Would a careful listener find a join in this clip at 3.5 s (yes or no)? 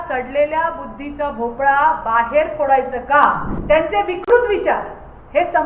yes